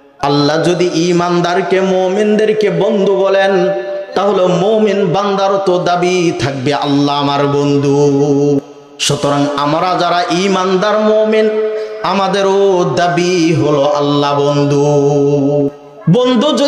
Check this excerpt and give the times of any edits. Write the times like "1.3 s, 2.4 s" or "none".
8.6 s, 15.7 s

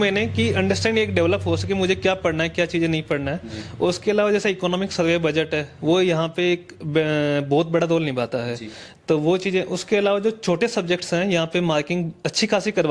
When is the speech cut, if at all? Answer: none

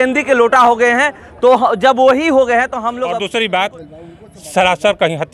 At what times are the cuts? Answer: 3.0 s

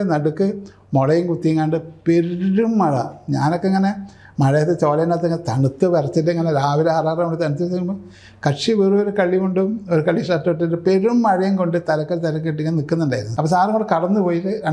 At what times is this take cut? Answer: 13.3 s

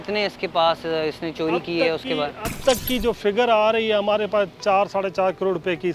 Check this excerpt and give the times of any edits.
none

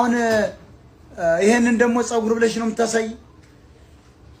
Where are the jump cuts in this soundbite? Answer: none

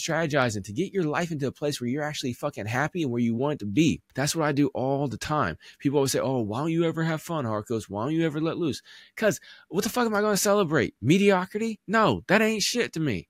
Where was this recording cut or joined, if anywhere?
4.1 s

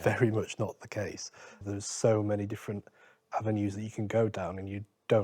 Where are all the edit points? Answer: 1.6 s

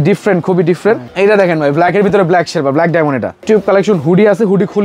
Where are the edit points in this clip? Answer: 1.1 s, 3.3 s

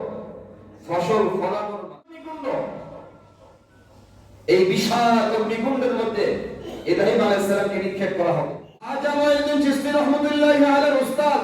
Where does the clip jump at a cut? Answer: 2.2 s, 9.0 s

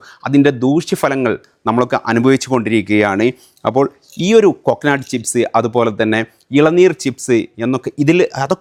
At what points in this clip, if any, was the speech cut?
none

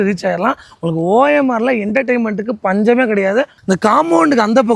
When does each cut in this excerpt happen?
3.6 s

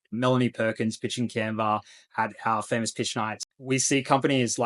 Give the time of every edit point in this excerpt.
3.4 s

